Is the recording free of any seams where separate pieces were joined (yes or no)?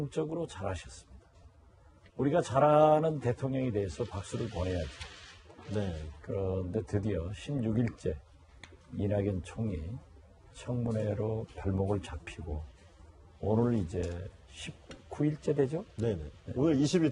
yes